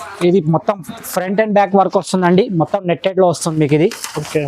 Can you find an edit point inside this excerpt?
no; 0 cuts

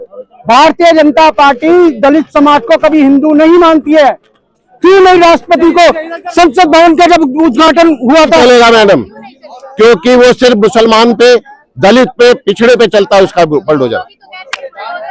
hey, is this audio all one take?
no; 1 cut; at 8.4 s

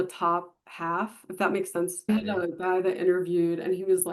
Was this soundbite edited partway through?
yes; 1 cut; at 2.1 s

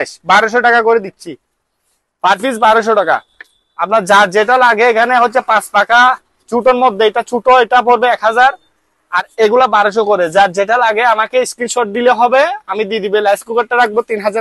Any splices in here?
no; 0 cuts

